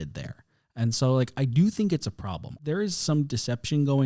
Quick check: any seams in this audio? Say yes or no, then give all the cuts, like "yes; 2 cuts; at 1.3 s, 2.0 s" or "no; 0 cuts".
yes; 1 cut; at 2.6 s